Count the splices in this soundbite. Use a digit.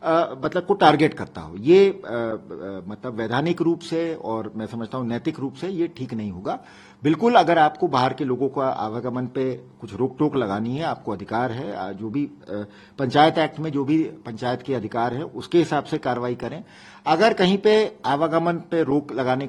0